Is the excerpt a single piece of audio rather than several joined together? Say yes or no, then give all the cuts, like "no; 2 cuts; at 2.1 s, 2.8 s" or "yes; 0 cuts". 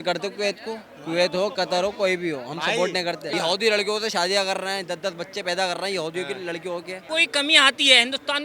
no; 2 cuts; at 3.3 s, 7.0 s